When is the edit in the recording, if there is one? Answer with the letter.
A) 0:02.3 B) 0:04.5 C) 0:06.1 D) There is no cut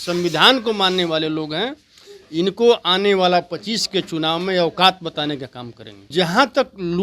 C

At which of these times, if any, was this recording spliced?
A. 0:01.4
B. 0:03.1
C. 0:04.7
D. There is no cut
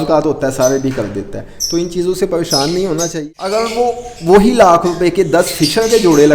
B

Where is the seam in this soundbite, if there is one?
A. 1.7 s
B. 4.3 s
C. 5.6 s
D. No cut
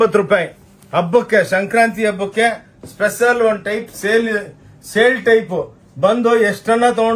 D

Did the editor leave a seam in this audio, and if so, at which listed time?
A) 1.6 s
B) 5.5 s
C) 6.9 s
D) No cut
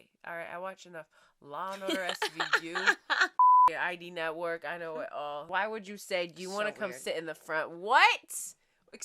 B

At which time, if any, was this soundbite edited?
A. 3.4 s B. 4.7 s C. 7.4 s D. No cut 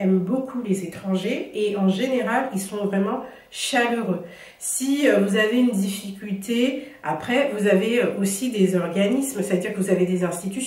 D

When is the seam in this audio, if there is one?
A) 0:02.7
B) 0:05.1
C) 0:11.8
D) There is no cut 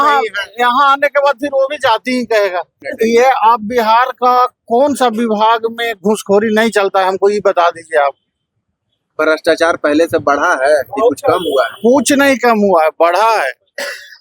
A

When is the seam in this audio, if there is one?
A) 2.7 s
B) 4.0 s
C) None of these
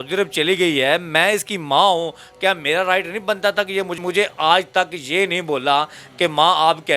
B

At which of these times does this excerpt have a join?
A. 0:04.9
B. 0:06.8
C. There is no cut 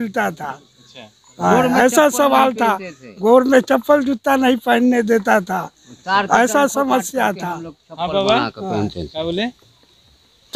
C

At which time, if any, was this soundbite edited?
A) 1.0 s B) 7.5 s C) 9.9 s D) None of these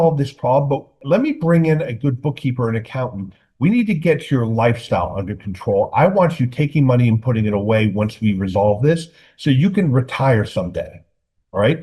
A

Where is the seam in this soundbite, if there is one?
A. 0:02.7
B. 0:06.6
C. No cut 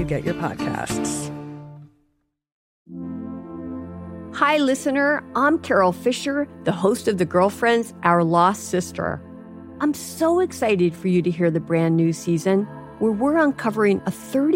A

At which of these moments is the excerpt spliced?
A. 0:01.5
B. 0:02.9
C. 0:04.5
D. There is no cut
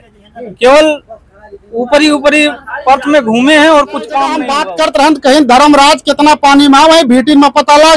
C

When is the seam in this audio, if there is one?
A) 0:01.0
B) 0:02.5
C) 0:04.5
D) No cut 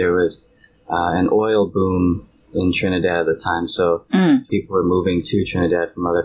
C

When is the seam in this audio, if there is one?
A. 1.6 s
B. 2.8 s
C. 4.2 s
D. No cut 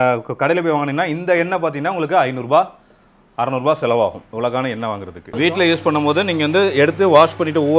D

